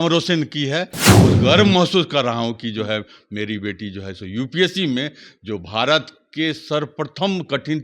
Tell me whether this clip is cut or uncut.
cut